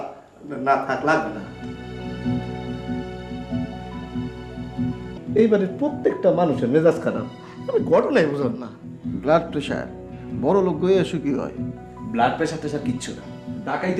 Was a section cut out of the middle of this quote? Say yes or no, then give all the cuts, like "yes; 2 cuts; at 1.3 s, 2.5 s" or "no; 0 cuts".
yes; 1 cut; at 5.1 s